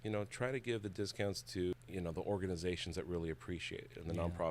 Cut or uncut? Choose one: cut